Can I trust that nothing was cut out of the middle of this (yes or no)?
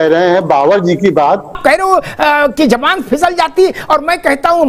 no